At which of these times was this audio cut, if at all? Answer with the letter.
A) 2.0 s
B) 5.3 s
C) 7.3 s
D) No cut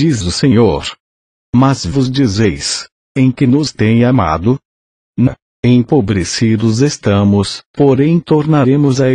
D